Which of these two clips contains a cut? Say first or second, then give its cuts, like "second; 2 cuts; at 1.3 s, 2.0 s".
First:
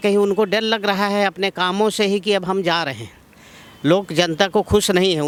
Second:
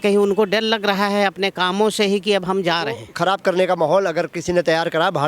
second; 1 cut; at 3.1 s